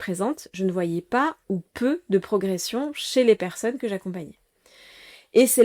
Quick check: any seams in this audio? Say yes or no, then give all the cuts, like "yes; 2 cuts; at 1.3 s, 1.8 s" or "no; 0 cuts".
no; 0 cuts